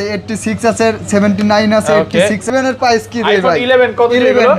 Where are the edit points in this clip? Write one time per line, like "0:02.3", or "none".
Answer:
0:02.4